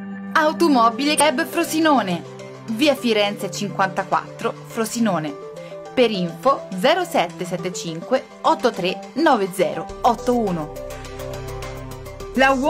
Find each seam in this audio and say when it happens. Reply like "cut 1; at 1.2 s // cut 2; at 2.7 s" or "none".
cut 1; at 1.2 s